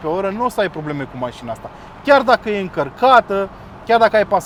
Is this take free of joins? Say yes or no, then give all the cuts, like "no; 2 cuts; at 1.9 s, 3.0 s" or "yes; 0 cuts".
yes; 0 cuts